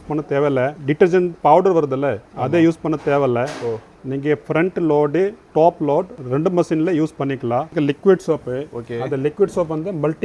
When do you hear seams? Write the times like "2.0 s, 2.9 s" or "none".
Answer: 6.2 s, 7.7 s